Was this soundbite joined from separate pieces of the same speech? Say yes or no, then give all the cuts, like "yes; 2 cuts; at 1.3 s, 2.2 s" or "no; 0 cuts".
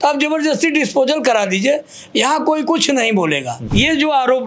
yes; 1 cut; at 3.5 s